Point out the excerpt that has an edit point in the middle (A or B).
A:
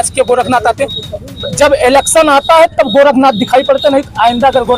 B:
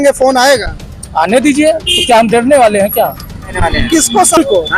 B